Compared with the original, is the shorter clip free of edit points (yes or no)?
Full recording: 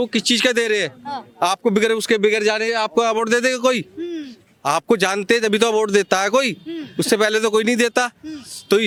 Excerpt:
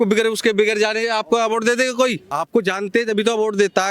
no